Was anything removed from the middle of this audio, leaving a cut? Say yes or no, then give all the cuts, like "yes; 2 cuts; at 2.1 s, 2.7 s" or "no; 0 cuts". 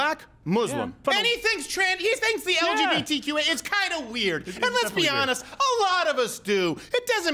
yes; 1 cut; at 1.0 s